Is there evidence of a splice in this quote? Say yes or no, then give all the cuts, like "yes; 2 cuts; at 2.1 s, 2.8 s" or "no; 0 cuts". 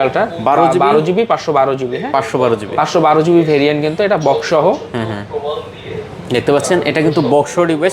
no; 0 cuts